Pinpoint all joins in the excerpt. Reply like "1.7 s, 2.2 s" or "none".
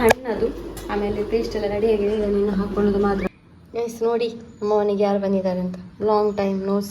3.3 s